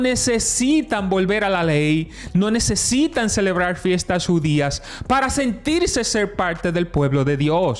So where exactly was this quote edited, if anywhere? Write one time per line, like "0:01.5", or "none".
none